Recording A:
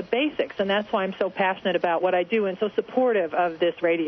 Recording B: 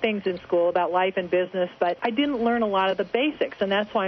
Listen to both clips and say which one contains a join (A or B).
B